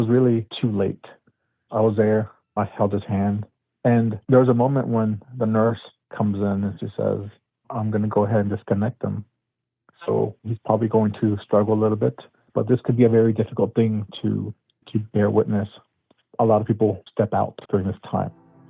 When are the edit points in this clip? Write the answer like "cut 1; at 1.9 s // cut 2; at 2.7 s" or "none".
cut 1; at 7.6 s // cut 2; at 10.4 s // cut 3; at 14.7 s